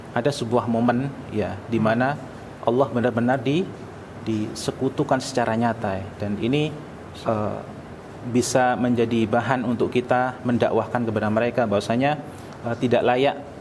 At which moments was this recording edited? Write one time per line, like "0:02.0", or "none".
none